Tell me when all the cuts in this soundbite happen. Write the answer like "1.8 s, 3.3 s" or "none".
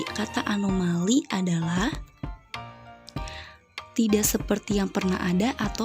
1.9 s, 3.9 s